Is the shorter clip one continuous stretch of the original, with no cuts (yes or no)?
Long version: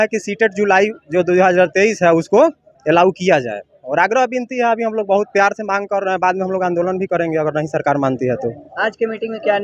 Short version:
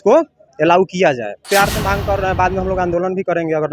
no